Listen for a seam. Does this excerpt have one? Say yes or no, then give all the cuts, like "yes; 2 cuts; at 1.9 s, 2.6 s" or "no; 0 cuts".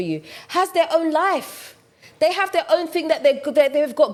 no; 0 cuts